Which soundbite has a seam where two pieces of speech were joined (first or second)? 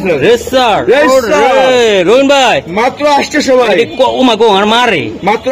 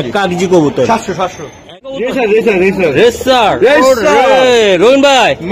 second